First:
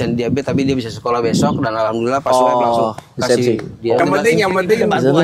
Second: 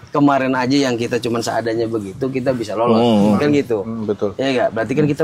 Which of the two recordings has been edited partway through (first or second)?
first